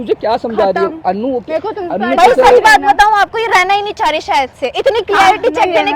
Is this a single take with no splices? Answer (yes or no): yes